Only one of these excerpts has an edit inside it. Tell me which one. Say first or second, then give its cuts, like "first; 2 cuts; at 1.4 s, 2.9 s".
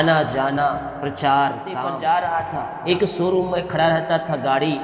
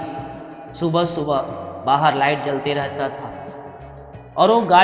first; 2 cuts; at 1.8 s, 2.8 s